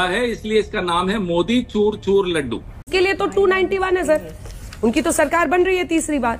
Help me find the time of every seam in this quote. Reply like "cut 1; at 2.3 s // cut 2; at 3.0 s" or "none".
cut 1; at 2.3 s

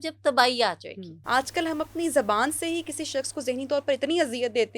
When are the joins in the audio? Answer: cut 1; at 1.1 s

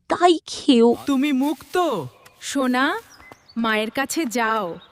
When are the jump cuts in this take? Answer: cut 1; at 1.0 s

